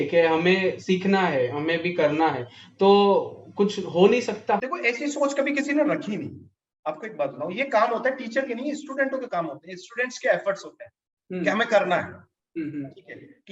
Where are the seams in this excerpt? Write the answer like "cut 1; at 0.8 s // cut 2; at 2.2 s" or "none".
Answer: cut 1; at 4.7 s